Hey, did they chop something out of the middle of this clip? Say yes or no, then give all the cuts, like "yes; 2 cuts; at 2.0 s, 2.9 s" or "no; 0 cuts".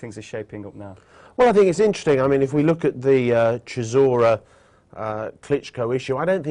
no; 0 cuts